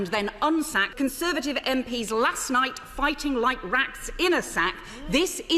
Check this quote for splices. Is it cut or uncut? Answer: cut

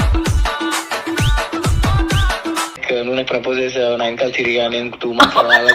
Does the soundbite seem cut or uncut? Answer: cut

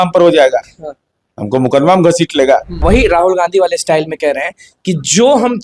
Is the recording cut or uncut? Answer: cut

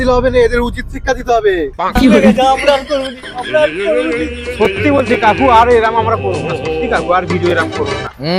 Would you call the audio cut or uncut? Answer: uncut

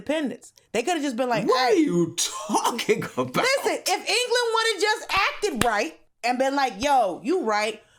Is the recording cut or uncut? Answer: cut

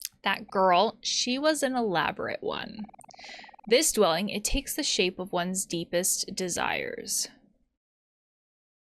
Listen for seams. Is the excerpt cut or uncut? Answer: cut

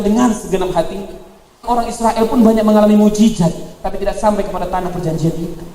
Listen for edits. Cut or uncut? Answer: cut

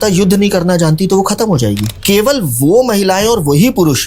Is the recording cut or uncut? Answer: cut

